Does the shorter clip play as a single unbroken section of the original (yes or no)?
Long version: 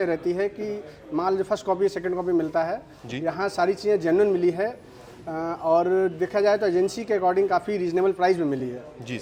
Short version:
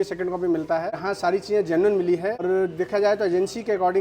no